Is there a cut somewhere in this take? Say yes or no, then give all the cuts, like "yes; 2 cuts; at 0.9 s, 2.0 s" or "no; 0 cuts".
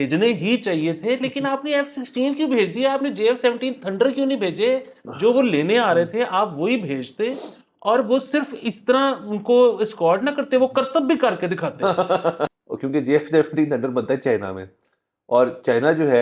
yes; 1 cut; at 12.5 s